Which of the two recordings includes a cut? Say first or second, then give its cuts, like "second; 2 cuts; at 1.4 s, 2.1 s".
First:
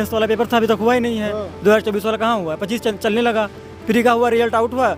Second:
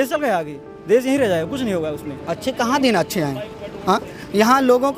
second; 1 cut; at 2.2 s